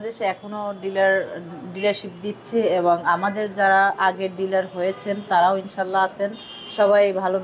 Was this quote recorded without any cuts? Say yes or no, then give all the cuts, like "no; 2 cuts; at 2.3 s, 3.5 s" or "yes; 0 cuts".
yes; 0 cuts